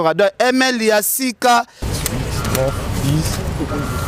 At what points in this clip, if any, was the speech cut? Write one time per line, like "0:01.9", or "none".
0:01.9

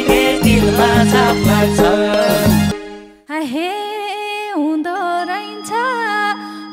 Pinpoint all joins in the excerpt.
none

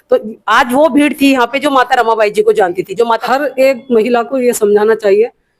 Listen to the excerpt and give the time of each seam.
0:03.2

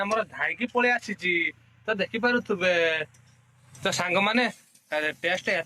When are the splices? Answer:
none

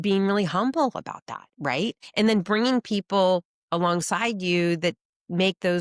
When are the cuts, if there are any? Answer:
0:02.0

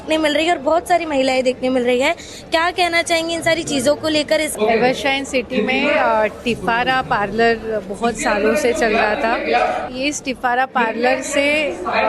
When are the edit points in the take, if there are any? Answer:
0:04.5
0:09.9

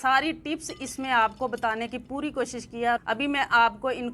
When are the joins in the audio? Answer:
0:03.0

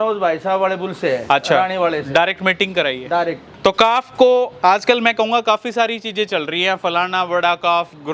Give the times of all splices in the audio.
0:03.5

